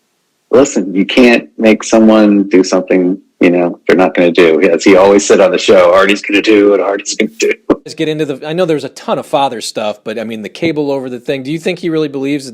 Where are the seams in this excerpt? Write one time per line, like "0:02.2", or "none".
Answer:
0:07.9